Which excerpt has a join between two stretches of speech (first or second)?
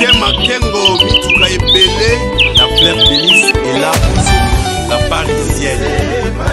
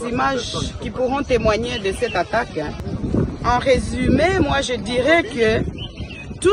second